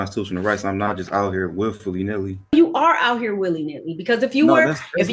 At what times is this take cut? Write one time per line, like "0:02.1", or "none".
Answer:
0:02.5